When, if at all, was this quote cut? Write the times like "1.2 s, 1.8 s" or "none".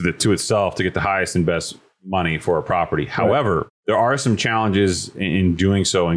3.7 s